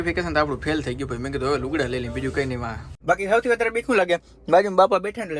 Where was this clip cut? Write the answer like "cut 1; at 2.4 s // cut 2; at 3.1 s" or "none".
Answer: cut 1; at 2.9 s